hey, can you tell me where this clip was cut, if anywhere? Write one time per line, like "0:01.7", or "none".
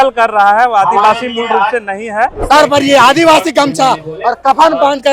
0:02.4